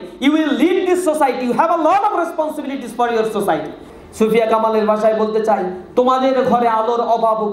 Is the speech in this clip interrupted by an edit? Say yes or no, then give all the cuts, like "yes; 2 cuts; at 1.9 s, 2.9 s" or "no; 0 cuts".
yes; 1 cut; at 3.9 s